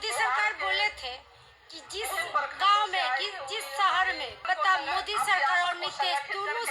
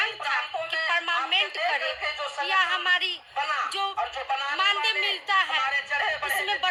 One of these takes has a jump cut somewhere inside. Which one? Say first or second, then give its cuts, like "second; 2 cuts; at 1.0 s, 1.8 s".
first; 1 cut; at 4.4 s